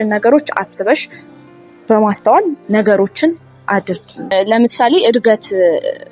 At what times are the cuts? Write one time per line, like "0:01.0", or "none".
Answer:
0:04.2